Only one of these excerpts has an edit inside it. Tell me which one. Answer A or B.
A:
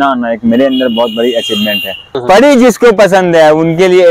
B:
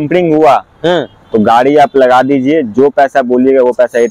A